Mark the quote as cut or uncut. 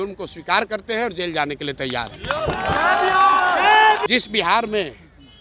cut